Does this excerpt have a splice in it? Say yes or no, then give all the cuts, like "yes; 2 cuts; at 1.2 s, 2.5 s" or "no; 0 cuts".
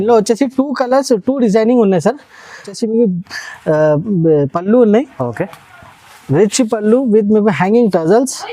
yes; 1 cut; at 2.7 s